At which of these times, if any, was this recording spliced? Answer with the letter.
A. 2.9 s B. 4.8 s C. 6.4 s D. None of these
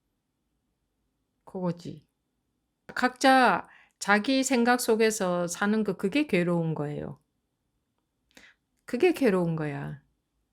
A